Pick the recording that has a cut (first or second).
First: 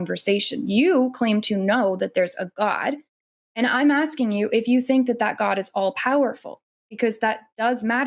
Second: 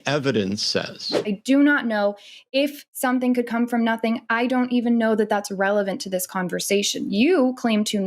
second